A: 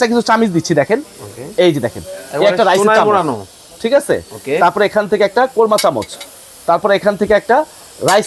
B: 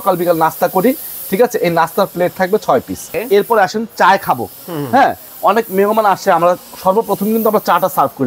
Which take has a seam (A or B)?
B